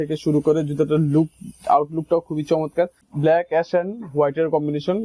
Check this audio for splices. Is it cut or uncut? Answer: cut